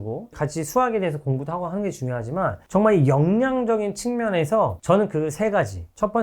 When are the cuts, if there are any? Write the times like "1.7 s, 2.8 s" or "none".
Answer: 4.8 s